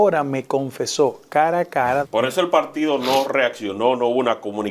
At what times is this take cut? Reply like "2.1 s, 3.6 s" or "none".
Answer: 2.1 s